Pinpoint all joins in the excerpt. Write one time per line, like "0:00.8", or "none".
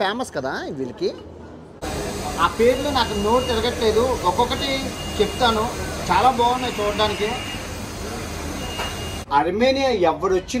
0:01.9
0:09.2